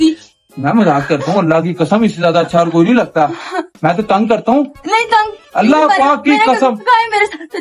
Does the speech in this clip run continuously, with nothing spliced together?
yes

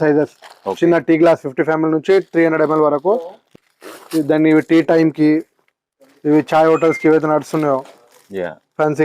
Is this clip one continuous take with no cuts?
no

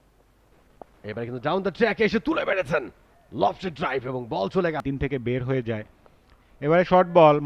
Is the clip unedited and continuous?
no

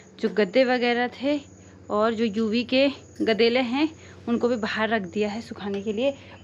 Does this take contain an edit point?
no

